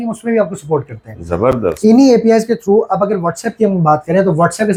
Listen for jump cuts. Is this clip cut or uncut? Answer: uncut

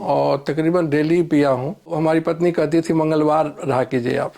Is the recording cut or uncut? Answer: cut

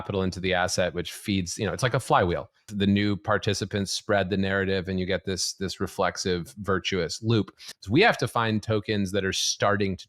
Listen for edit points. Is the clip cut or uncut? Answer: cut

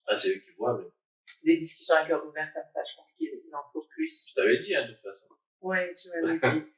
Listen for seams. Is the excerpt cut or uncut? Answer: cut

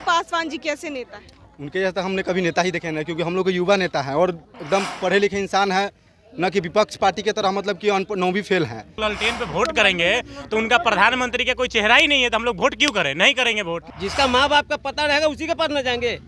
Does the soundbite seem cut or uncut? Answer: cut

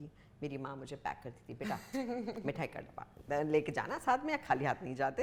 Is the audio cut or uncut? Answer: uncut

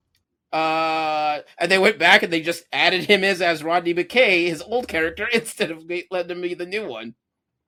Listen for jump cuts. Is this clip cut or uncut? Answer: uncut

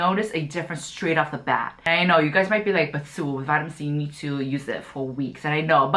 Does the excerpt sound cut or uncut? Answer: uncut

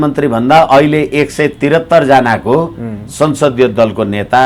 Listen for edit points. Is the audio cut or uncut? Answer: uncut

